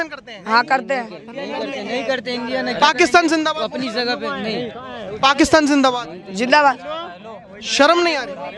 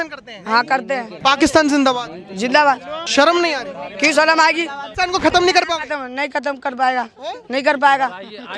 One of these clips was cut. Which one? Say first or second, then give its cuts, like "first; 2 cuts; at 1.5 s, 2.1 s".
second; 3 cuts; at 1.1 s, 2.9 s, 4.8 s